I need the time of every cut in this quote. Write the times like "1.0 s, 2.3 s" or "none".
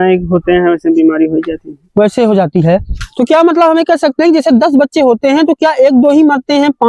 none

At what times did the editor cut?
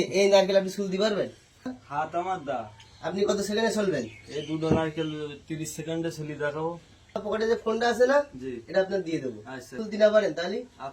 1.8 s, 7.2 s, 9.8 s

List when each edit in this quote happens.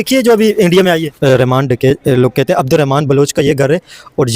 1.1 s

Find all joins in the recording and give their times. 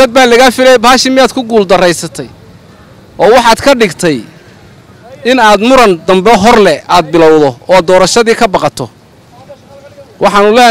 none

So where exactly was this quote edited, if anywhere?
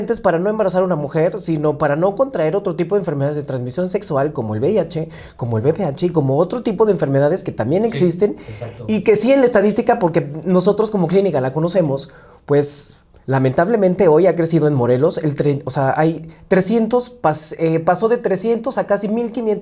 none

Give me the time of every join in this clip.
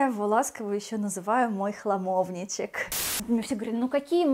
3.1 s

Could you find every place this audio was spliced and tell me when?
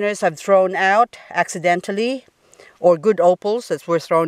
none

